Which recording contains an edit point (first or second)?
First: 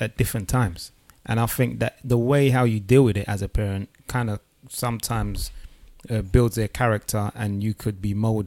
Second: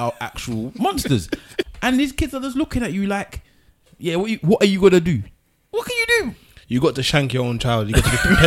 second